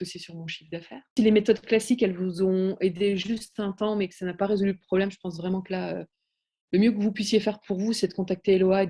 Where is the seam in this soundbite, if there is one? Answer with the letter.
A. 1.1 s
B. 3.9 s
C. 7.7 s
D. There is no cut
A